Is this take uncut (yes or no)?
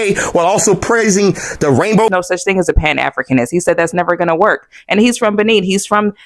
no